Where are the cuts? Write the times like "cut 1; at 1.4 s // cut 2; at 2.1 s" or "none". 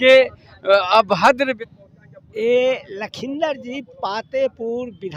cut 1; at 1.5 s